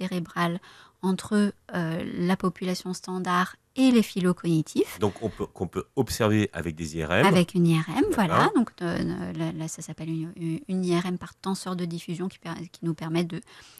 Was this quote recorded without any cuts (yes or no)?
yes